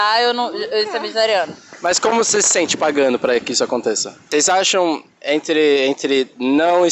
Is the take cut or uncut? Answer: cut